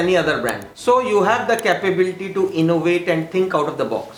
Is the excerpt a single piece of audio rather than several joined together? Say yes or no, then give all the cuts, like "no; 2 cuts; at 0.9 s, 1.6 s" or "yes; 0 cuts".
yes; 0 cuts